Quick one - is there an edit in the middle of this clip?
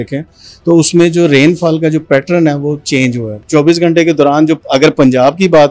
yes; 1 cut; at 3.4 s

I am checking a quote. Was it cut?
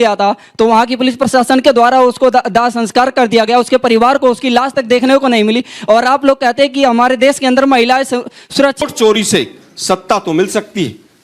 yes; 1 cut; at 8.8 s

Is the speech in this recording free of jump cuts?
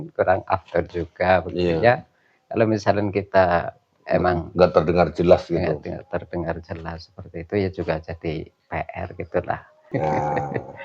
no; 1 cut; at 9.7 s

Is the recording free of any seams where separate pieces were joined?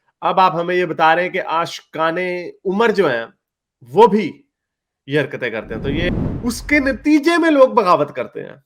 no; 1 cut; at 6.1 s

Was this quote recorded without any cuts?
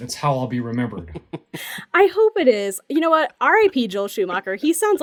yes; 0 cuts

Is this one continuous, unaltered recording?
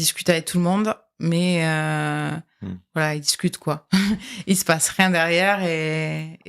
yes; 0 cuts

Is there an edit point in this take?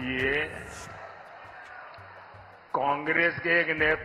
no; 0 cuts

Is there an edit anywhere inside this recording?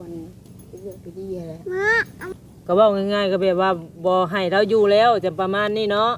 yes; 1 cut; at 2.3 s

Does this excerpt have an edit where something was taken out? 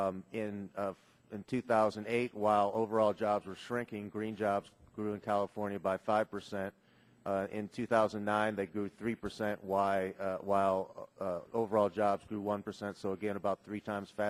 no; 0 cuts

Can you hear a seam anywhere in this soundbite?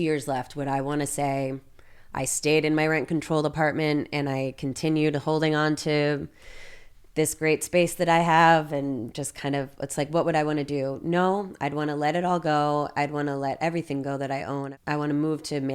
no; 0 cuts

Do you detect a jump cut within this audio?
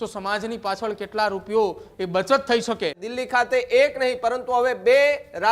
yes; 1 cut; at 3.1 s

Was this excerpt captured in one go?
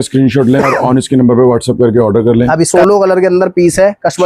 no; 1 cut; at 2.7 s

